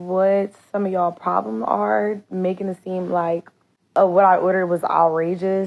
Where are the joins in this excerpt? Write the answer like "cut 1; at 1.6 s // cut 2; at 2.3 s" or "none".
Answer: cut 1; at 4.0 s